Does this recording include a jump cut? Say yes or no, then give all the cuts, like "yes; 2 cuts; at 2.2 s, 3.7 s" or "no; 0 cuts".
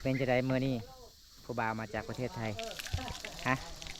no; 0 cuts